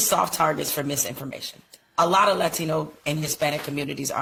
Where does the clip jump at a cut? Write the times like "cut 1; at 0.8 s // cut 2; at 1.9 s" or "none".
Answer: none